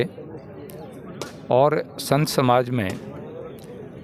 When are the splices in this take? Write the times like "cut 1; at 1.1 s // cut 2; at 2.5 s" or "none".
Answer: none